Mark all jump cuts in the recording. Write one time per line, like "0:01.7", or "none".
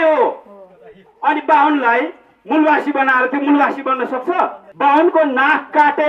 0:04.6